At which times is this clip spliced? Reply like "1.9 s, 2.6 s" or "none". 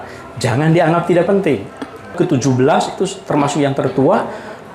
2.1 s

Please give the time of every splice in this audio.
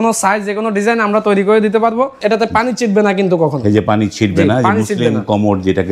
2.2 s

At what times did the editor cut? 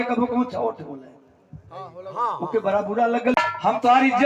3.3 s

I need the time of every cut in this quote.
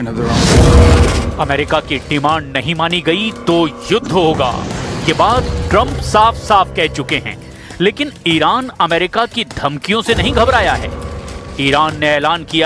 10.3 s

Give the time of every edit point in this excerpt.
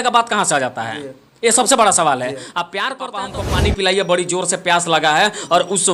3.3 s

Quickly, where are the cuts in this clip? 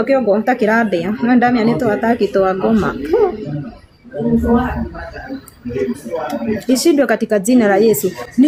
none

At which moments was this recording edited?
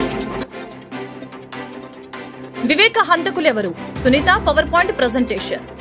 1.1 s

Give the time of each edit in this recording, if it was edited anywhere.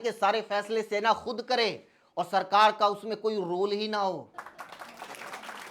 4.3 s

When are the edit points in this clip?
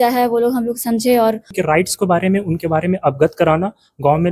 1.5 s

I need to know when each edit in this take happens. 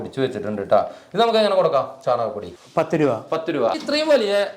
2.5 s, 3.7 s

